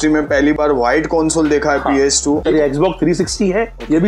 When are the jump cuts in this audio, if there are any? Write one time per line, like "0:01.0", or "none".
0:02.4